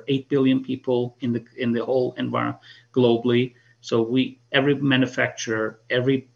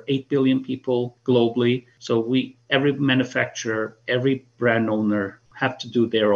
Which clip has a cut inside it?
second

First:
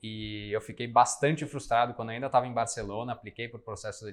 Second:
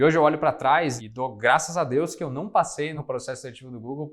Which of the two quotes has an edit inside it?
second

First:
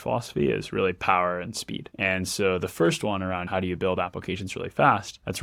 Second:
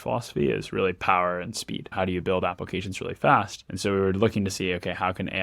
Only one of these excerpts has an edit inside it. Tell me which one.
second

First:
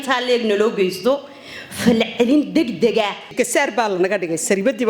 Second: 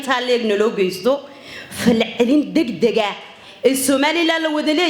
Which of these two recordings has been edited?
first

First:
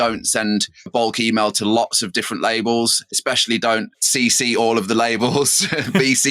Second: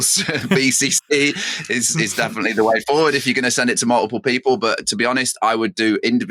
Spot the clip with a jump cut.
first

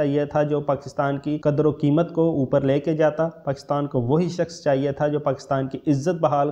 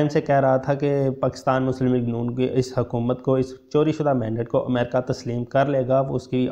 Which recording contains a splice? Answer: first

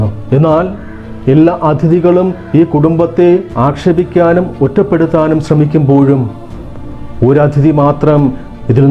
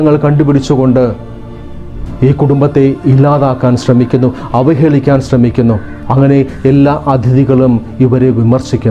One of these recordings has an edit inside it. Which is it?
second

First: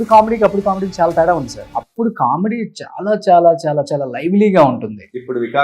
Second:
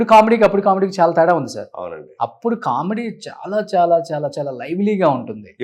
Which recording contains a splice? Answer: first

